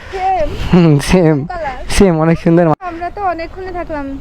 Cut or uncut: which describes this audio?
cut